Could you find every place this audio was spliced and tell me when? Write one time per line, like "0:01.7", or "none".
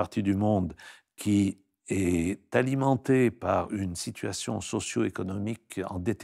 none